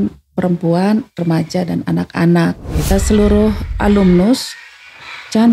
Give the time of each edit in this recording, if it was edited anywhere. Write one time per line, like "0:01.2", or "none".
0:02.9